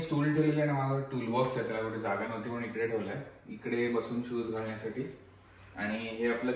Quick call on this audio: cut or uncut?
uncut